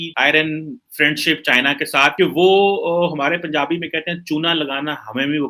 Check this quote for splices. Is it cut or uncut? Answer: uncut